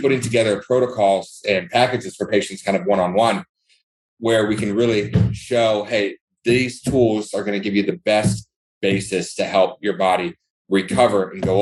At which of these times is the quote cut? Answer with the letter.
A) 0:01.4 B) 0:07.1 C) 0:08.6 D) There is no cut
D